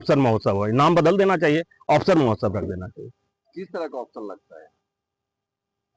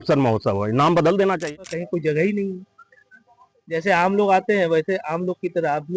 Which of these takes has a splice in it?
second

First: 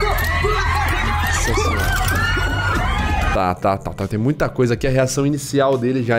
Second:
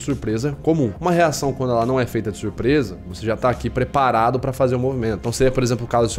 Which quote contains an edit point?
second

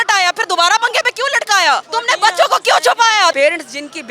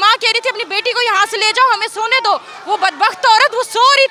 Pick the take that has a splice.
first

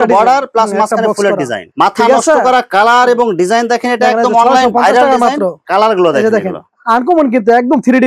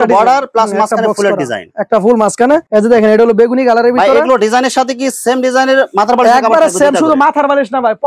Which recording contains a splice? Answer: first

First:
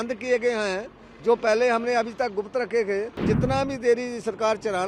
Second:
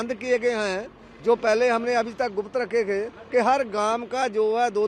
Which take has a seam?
first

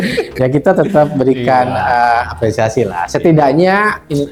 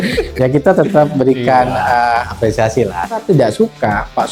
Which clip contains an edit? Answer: second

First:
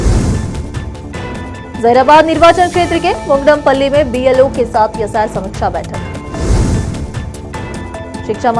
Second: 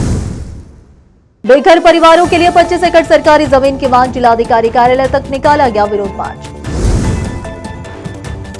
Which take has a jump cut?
second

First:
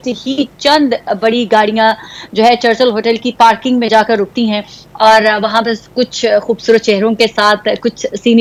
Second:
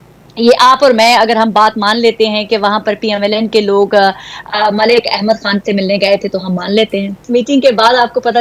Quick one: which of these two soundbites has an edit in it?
second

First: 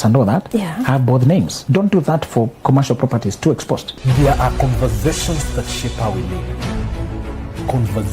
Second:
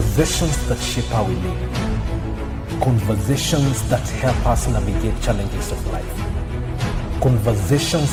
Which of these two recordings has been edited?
first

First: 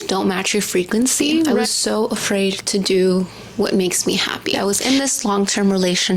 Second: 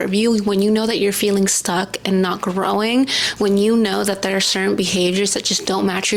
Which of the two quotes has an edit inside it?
first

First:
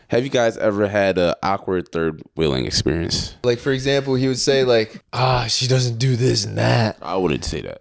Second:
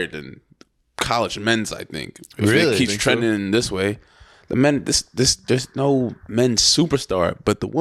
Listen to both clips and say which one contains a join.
first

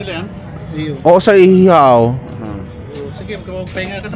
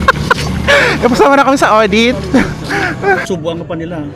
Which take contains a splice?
second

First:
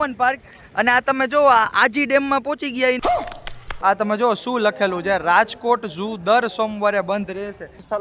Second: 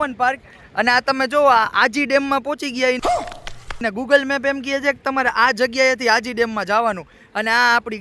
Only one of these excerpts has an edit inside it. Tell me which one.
first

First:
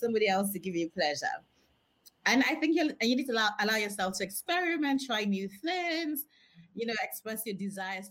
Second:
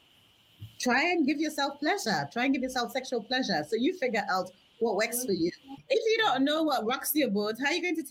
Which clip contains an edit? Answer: second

